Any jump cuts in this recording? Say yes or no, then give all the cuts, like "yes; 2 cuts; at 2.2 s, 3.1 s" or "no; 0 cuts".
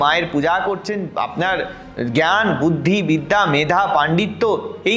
yes; 1 cut; at 1.1 s